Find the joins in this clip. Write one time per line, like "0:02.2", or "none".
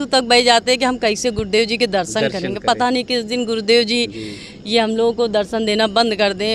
none